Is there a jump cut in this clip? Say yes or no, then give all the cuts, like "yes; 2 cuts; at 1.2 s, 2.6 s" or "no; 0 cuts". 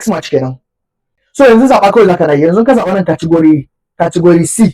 yes; 1 cut; at 1.2 s